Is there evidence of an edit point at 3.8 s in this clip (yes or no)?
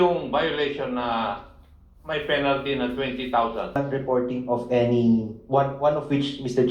yes